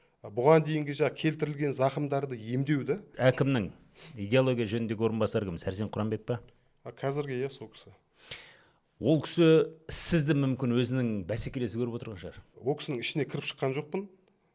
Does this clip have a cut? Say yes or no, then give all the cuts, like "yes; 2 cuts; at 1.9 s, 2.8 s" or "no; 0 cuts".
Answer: yes; 2 cuts; at 3.1 s, 12.5 s